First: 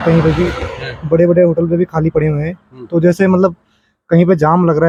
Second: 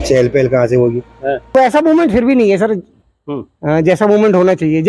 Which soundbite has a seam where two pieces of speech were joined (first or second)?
second